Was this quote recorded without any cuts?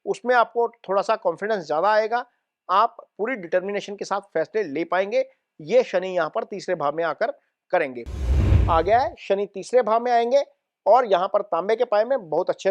no; 1 cut; at 8.5 s

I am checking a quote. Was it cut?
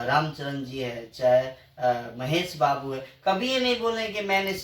no; 0 cuts

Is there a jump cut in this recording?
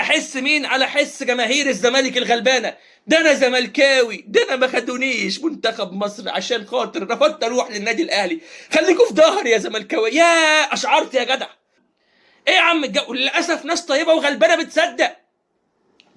no; 0 cuts

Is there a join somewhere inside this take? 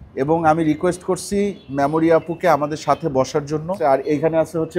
yes; 1 cut; at 3.8 s

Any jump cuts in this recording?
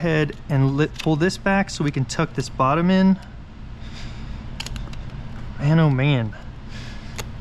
no; 0 cuts

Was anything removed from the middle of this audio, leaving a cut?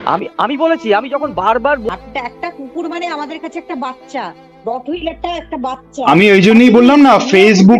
yes; 1 cut; at 1.9 s

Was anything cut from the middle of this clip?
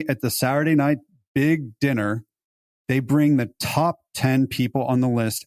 no; 0 cuts

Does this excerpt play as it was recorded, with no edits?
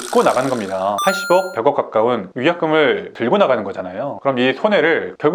no; 1 cut; at 4.1 s

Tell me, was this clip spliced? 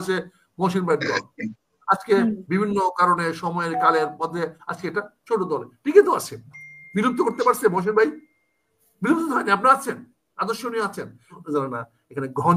yes; 1 cut; at 11.4 s

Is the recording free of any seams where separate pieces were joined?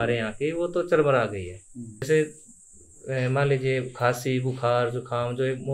yes; 0 cuts

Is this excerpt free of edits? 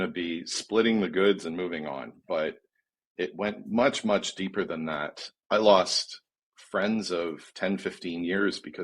no; 1 cut; at 5.3 s

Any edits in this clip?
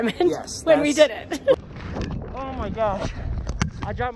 yes; 1 cut; at 1.5 s

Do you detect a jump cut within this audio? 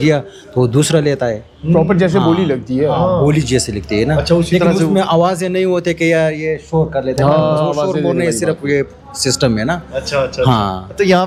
no; 0 cuts

